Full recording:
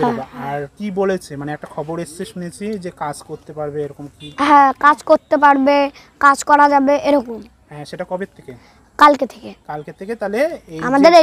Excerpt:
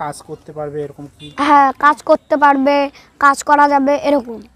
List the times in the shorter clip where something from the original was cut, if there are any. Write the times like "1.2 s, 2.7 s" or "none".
none

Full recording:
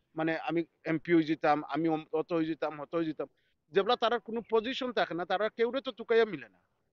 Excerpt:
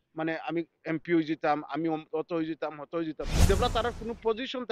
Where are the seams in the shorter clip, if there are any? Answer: 3.3 s

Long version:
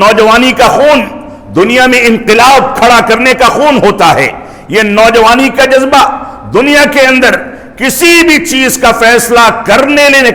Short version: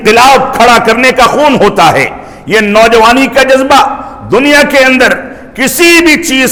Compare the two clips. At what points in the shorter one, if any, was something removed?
none

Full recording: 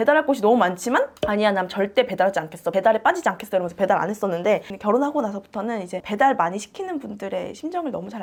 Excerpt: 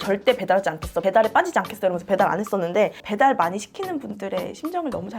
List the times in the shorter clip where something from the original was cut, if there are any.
3.0 s

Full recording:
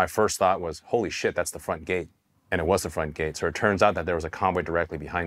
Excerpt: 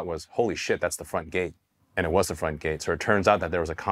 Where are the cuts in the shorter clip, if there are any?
none

